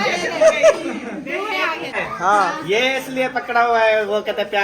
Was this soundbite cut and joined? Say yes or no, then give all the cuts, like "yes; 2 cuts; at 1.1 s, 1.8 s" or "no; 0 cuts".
yes; 1 cut; at 2.0 s